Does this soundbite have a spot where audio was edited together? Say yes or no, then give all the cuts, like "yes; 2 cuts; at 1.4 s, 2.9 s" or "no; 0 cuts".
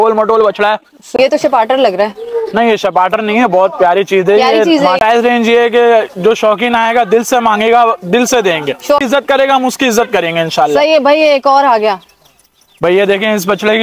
yes; 3 cuts; at 1.2 s, 5.0 s, 9.0 s